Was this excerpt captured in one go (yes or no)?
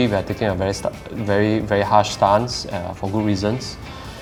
yes